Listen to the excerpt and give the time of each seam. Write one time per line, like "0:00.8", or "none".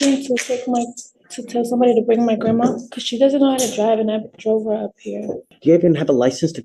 0:02.9
0:05.5

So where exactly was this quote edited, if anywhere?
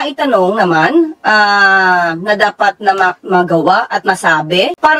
none

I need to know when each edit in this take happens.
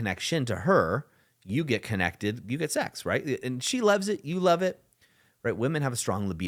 none

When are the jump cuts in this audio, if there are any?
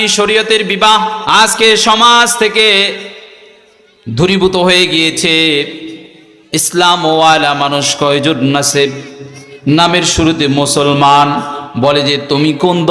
0:01.2

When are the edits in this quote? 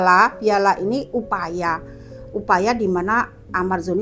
none

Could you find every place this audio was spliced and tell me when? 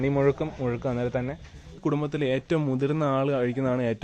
0:01.7

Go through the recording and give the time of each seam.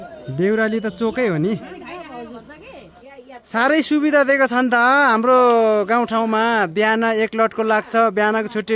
0:03.0

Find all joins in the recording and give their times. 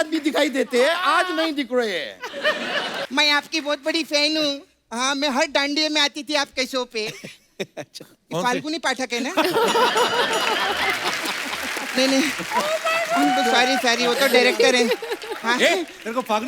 0:03.0

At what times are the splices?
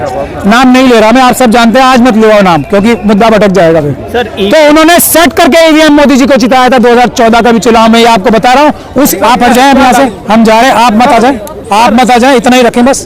0:09.1

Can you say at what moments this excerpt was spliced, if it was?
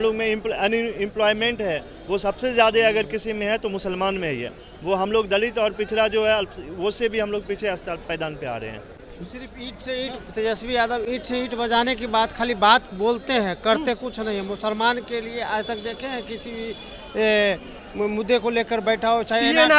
none

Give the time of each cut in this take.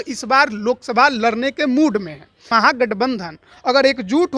0:02.5

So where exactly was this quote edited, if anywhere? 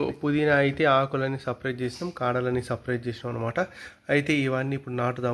none

